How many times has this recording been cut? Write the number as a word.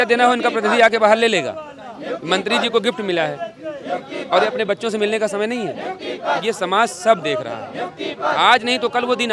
zero